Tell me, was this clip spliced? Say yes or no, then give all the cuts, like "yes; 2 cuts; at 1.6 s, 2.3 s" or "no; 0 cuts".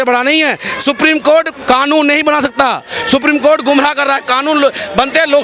no; 0 cuts